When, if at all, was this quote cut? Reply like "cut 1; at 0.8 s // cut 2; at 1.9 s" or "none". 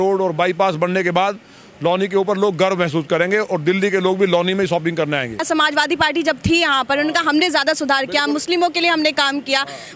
cut 1; at 5.4 s